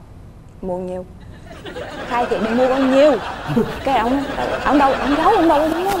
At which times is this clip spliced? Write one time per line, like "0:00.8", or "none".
none

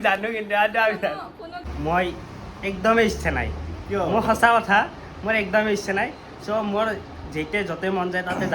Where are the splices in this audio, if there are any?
0:01.6

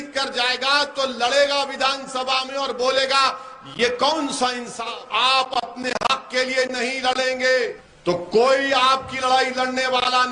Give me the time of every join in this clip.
0:04.9
0:07.9

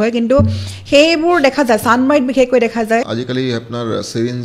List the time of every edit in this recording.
0:03.1

